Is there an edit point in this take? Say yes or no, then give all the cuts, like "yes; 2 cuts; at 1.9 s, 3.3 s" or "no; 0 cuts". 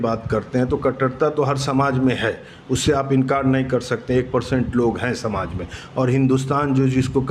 no; 0 cuts